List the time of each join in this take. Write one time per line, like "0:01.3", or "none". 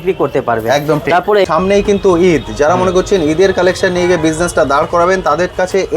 0:01.4